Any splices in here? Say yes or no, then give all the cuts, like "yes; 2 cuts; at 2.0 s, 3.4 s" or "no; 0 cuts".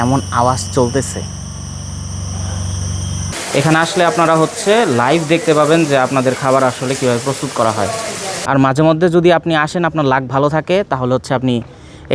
yes; 2 cuts; at 3.3 s, 8.0 s